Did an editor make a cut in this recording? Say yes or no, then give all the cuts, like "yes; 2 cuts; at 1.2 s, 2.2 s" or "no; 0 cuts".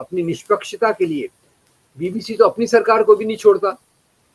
no; 0 cuts